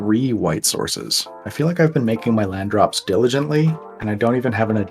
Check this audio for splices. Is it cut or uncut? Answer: cut